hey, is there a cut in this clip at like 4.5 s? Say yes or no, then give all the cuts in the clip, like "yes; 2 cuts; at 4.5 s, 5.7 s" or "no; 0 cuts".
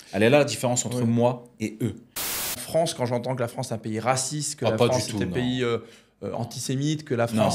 no; 1 cut; at 2.5 s